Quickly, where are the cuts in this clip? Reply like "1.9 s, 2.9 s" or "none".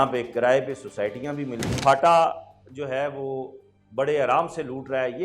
1.8 s